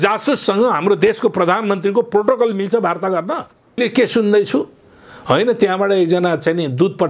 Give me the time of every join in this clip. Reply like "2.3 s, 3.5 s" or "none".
3.8 s